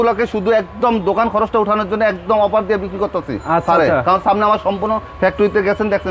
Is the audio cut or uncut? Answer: uncut